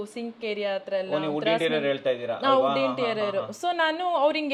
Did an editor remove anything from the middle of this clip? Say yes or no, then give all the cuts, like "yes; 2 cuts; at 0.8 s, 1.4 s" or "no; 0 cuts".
no; 0 cuts